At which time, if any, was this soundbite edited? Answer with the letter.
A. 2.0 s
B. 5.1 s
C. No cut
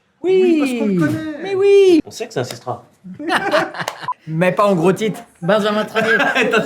A